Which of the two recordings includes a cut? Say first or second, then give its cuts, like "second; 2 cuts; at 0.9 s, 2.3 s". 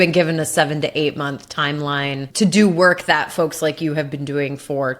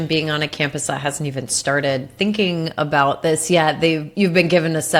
first; 1 cut; at 2.3 s